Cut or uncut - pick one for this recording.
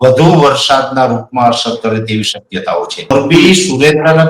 cut